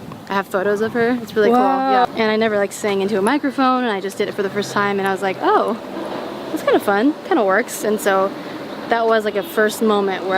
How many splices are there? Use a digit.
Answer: 1